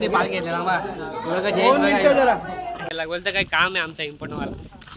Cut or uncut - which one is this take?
cut